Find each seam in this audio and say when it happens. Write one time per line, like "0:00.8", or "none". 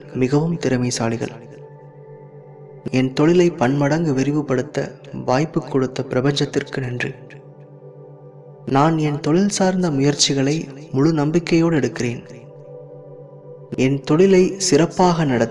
0:12.3
0:13.7